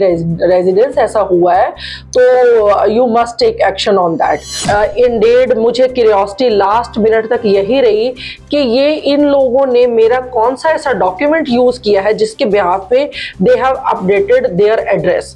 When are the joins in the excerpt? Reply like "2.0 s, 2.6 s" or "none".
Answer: 4.5 s